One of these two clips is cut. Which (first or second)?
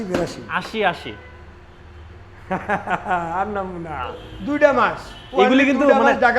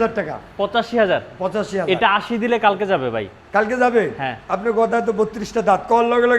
first